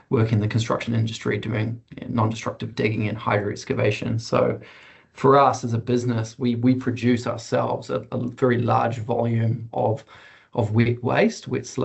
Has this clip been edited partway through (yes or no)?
no